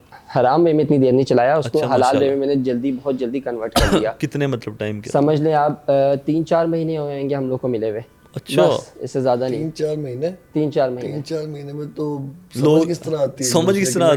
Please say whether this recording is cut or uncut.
uncut